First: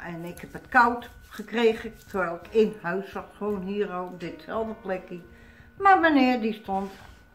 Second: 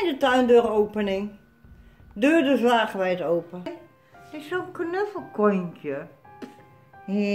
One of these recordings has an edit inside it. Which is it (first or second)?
second